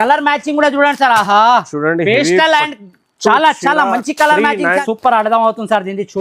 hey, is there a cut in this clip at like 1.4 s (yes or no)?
no